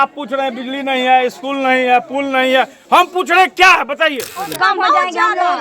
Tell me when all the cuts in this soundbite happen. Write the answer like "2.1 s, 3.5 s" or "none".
4.5 s